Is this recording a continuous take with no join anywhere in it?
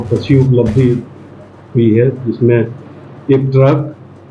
yes; 0 cuts

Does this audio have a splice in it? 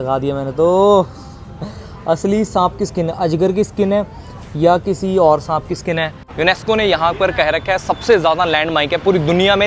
yes; 1 cut; at 6.2 s

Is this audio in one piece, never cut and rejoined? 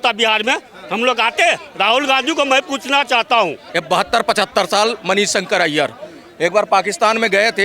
no; 1 cut; at 3.6 s

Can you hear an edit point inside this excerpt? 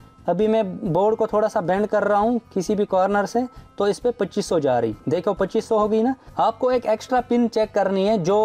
yes; 1 cut; at 6.3 s

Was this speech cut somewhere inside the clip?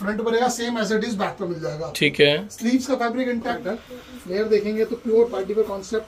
yes; 1 cut; at 3.6 s

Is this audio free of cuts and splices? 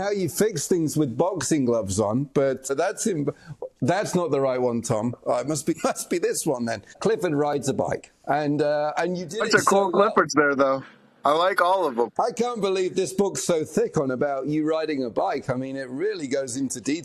no; 4 cuts; at 2.7 s, 5.7 s, 6.9 s, 12.1 s

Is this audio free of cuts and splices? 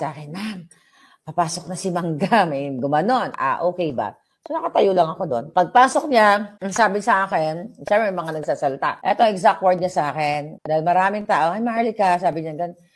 no; 4 cuts; at 5.5 s, 6.6 s, 9.0 s, 10.5 s

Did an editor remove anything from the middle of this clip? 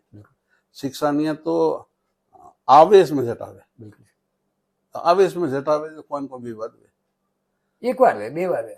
no; 0 cuts

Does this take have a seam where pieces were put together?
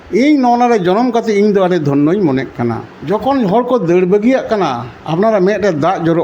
yes; 1 cut; at 2.9 s

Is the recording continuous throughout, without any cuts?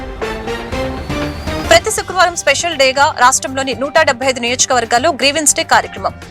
no; 1 cut; at 1.6 s

